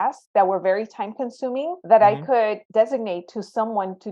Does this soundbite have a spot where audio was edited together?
yes; 2 cuts; at 1.8 s, 2.6 s

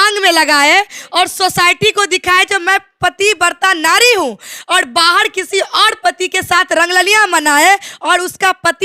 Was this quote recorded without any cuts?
yes; 0 cuts

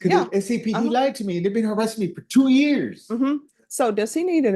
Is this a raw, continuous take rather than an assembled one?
yes; 0 cuts

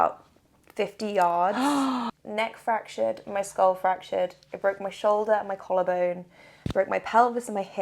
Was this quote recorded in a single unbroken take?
no; 1 cut; at 2.1 s

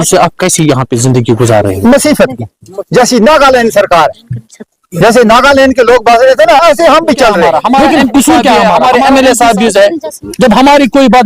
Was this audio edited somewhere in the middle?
yes; 1 cut; at 8.8 s

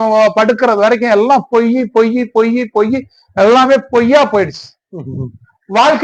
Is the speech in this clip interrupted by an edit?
no; 0 cuts

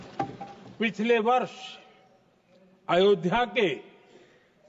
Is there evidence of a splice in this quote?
no; 0 cuts

